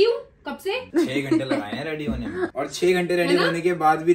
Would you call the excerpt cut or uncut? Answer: cut